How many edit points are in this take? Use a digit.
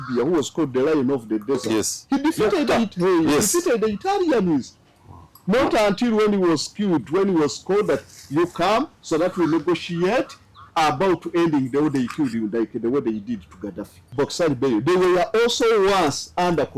1